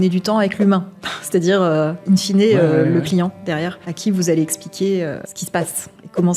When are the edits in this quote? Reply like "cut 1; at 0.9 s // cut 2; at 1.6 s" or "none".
cut 1; at 3.8 s // cut 2; at 5.3 s